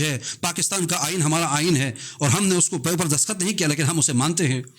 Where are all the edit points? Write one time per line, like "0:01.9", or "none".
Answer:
none